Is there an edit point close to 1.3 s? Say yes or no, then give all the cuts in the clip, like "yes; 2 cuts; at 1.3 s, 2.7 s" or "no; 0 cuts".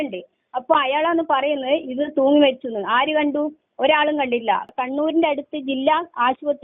no; 1 cut; at 4.7 s